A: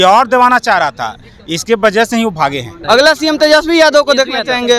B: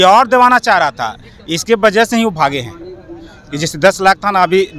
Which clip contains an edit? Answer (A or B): A